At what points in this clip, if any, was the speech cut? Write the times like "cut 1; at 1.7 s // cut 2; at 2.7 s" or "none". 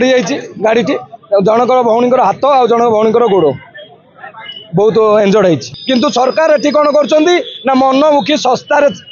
cut 1; at 5.7 s